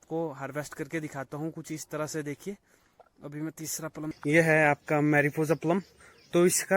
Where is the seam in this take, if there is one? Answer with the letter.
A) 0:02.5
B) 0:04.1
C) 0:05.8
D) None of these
B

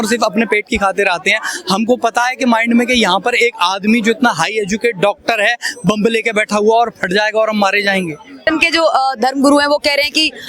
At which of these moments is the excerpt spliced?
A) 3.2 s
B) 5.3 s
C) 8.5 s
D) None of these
C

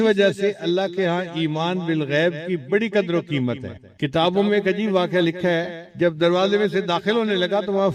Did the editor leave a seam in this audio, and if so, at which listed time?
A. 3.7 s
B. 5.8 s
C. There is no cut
B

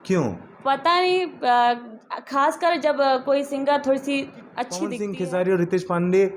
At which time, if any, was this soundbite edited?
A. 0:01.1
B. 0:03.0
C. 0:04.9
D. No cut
C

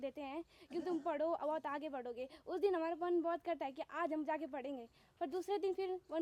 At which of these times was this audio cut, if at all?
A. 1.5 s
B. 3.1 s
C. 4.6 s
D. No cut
D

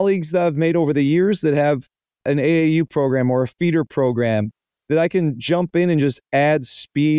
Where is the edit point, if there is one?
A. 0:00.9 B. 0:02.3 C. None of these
B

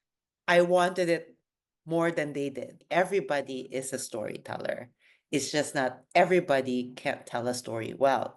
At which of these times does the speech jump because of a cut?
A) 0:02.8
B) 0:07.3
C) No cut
A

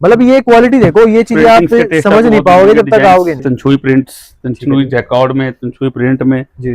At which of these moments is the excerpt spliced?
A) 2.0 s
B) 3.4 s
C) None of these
B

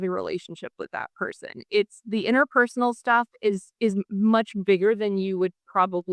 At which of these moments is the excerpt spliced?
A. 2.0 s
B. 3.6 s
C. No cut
C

